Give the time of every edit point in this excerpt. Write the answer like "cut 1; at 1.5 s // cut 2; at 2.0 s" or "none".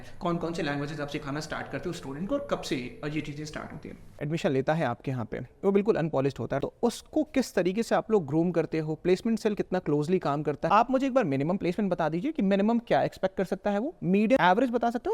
cut 1; at 4.2 s // cut 2; at 6.6 s // cut 3; at 10.7 s // cut 4; at 14.4 s